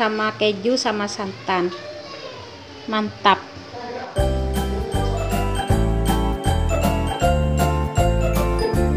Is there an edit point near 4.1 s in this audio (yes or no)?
yes